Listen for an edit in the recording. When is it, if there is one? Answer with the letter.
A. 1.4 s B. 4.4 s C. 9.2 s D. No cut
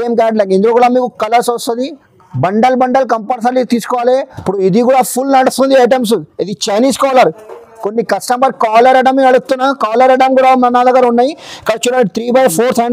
B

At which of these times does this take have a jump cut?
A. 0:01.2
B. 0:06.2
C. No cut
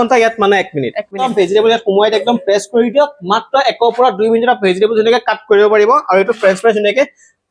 A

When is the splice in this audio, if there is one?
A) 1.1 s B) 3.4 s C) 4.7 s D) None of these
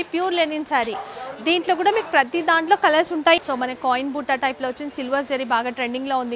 B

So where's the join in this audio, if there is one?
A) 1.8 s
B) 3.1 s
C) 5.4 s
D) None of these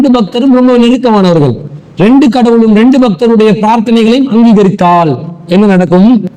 D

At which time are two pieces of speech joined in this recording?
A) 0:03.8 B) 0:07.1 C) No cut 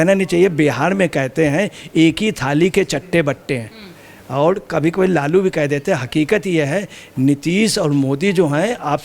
C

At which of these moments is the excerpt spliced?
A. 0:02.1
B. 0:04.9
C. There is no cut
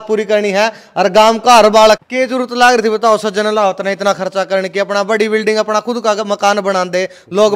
A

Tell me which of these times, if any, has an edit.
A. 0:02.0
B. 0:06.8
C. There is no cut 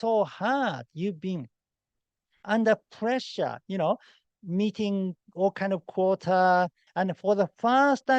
B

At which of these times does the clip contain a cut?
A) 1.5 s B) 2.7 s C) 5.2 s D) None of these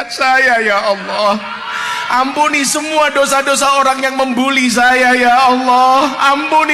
D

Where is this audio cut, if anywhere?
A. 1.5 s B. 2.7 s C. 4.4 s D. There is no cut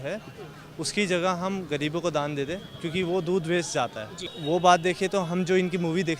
C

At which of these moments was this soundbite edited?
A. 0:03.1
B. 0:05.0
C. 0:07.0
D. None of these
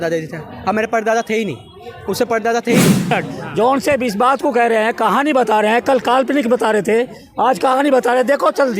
A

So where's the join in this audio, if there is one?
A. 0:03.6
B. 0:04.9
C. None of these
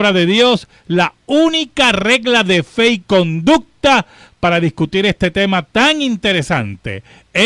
B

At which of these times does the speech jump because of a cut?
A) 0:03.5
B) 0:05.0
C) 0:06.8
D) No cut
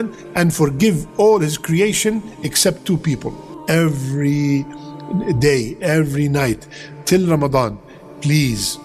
A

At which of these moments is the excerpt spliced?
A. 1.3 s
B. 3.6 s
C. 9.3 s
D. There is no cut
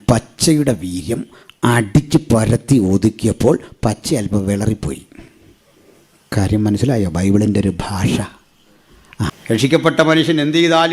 C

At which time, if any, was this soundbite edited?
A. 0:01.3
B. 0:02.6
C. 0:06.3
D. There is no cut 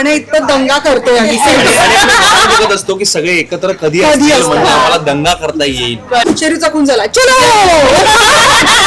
C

